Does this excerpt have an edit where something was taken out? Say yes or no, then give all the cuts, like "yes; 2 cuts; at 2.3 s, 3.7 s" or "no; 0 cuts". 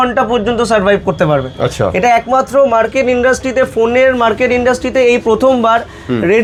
no; 0 cuts